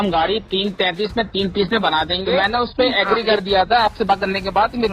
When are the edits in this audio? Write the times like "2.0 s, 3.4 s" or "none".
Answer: 2.4 s